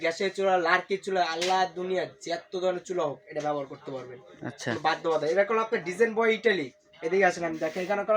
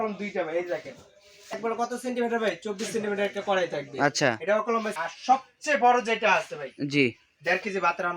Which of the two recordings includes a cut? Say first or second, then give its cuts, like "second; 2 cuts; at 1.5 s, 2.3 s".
second; 2 cuts; at 1.6 s, 4.9 s